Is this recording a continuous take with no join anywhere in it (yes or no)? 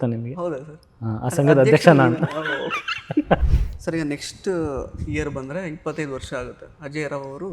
no